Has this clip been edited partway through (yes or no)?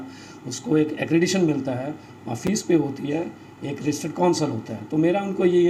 no